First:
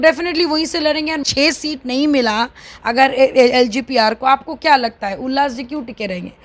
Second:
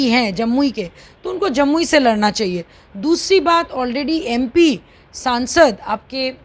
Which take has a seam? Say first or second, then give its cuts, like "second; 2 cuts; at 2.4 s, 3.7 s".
first; 1 cut; at 1.2 s